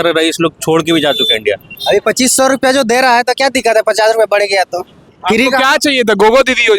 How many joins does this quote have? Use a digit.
2